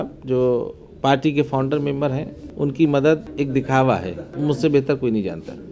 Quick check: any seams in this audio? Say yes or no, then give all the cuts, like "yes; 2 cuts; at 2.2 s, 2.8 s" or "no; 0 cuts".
yes; 3 cuts; at 2.4 s, 3.3 s, 4.3 s